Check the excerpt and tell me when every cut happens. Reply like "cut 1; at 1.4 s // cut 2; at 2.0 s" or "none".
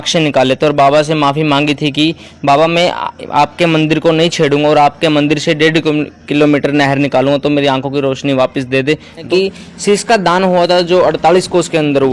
cut 1; at 9.2 s